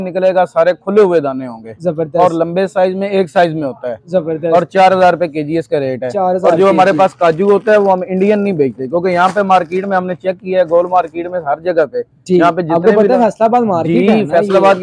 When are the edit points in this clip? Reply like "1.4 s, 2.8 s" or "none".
none